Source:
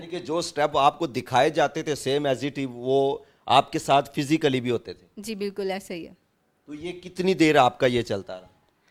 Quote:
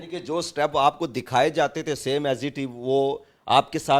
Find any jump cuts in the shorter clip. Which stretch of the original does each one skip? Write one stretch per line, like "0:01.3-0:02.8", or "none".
none